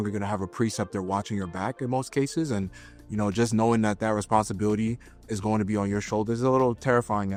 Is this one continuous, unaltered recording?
yes; 0 cuts

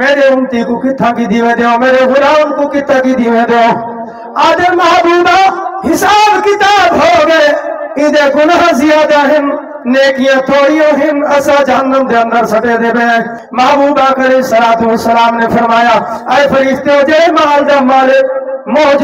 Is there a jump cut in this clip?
yes; 1 cut; at 13.4 s

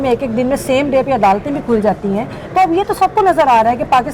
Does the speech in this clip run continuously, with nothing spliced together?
yes; 0 cuts

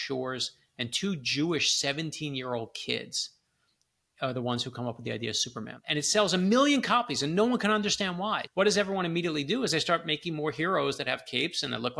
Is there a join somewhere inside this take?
yes; 2 cuts; at 5.7 s, 8.4 s

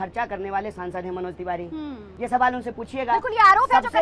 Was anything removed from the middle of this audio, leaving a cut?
yes; 1 cut; at 2.1 s

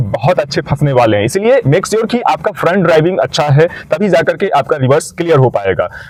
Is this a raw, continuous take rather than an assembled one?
yes; 0 cuts

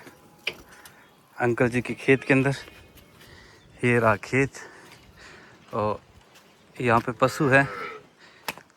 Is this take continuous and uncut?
yes; 0 cuts

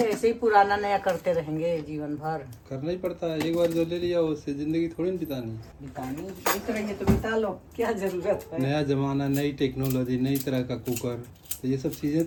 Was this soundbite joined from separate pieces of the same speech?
no; 0 cuts

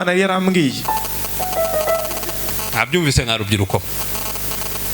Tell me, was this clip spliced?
yes; 1 cut; at 2.4 s

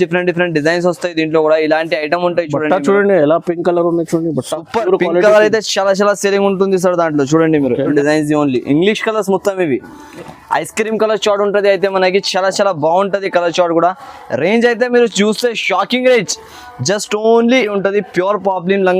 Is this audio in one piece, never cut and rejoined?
no; 2 cuts; at 7.9 s, 17.7 s

